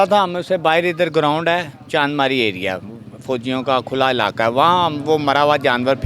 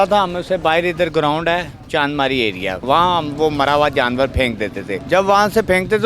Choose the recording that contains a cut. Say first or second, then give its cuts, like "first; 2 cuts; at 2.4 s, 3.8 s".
second; 2 cuts; at 2.8 s, 4.9 s